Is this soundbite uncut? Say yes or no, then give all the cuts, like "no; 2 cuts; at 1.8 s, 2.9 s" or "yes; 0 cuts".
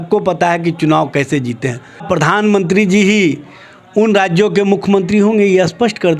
no; 1 cut; at 2.0 s